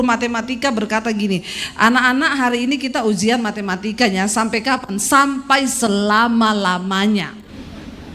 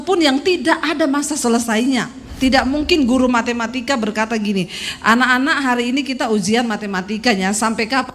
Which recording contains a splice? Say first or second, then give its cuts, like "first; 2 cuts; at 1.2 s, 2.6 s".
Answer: second; 1 cut; at 2.3 s